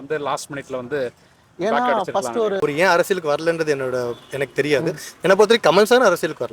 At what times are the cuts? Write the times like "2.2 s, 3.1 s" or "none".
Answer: 2.6 s